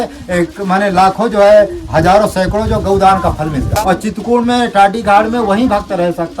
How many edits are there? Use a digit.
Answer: 1